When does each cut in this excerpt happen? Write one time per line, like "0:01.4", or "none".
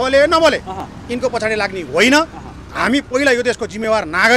none